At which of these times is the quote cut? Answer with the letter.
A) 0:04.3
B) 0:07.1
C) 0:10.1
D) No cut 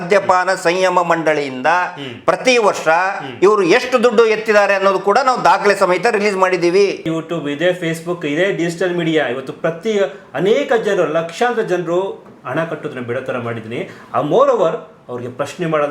B